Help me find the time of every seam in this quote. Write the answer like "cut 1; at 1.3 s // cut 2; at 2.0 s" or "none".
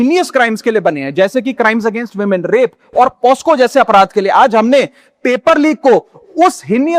none